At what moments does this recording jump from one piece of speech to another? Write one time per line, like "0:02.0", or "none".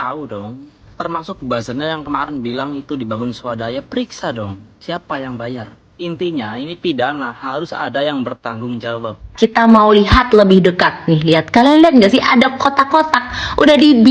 0:09.3